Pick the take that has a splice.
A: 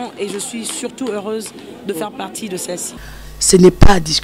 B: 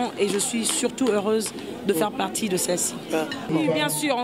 A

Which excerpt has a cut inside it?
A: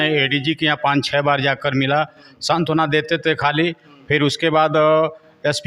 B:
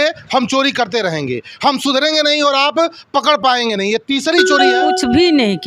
B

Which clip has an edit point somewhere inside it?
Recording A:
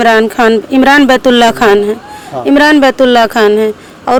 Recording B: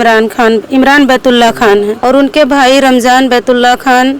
B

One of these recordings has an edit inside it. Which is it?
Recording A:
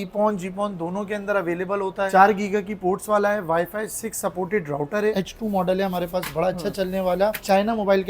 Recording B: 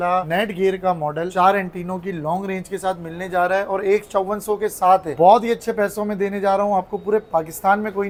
A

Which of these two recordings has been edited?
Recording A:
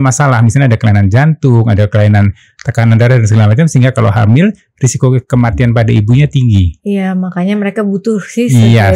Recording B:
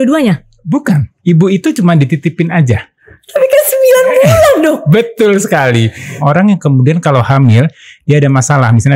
B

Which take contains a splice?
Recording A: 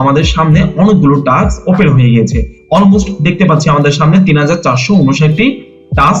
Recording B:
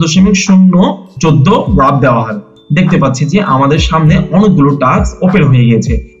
B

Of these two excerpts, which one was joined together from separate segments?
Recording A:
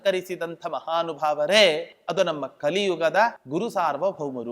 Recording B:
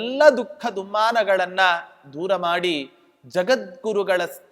A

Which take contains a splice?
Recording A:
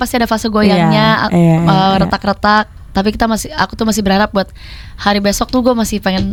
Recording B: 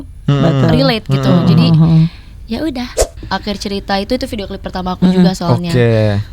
B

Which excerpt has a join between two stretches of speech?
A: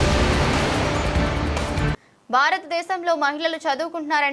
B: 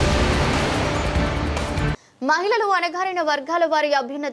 A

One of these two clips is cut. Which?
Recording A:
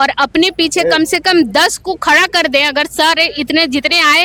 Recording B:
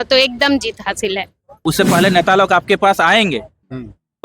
B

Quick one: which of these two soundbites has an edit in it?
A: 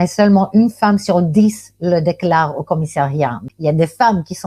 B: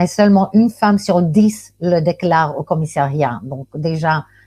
A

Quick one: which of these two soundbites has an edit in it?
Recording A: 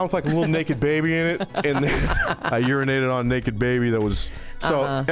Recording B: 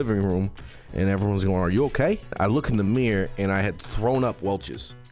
B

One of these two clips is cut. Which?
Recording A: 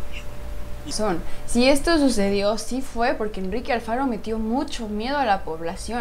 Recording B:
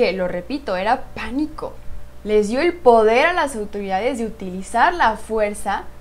A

